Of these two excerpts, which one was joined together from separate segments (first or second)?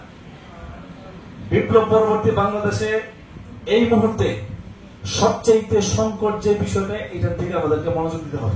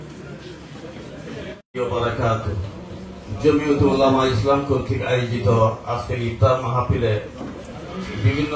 second